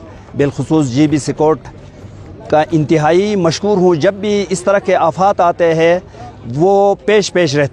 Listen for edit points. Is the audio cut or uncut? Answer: uncut